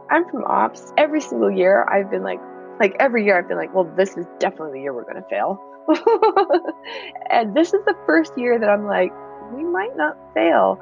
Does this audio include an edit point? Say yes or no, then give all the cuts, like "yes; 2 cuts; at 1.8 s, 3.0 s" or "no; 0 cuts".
yes; 1 cut; at 2.5 s